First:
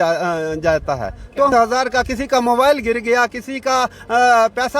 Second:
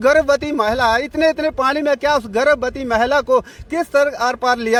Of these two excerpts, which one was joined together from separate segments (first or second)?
first